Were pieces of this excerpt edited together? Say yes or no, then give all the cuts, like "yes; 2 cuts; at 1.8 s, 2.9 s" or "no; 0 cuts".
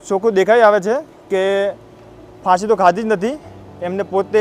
no; 0 cuts